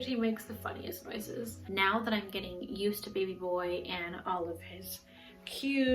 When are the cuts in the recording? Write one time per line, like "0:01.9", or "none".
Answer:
0:01.6